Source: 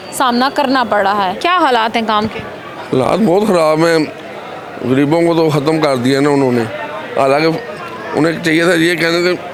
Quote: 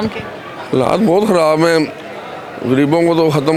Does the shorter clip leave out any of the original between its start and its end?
no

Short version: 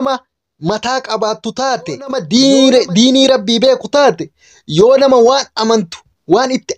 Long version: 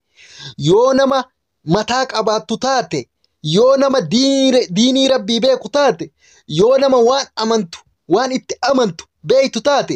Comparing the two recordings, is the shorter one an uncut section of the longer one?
no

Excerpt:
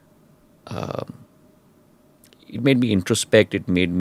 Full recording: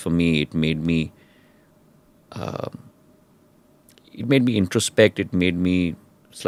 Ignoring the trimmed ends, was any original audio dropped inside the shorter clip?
no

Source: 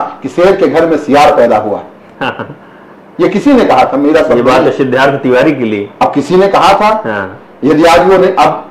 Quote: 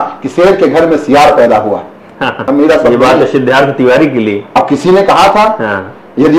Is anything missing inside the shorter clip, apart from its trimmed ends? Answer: yes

